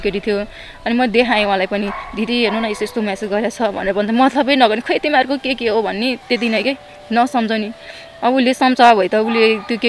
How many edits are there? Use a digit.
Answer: 0